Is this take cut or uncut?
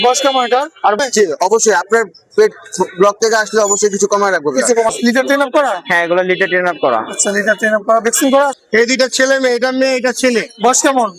cut